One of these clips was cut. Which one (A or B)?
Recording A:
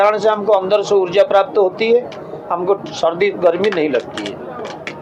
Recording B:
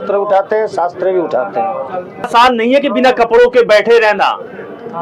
B